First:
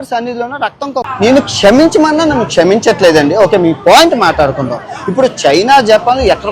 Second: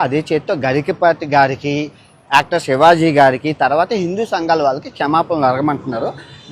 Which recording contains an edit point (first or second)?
first